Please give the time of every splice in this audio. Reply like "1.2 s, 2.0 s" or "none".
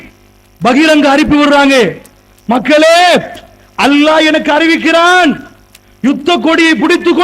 4.2 s